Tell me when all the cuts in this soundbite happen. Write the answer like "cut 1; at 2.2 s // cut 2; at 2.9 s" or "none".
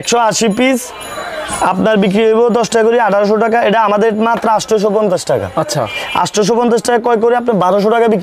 none